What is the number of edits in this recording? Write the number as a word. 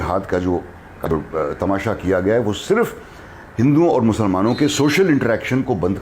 one